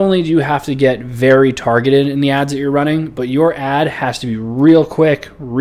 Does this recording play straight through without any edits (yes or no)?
yes